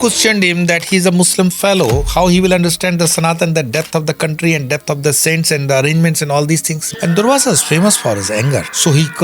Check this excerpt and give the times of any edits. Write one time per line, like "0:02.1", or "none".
0:06.8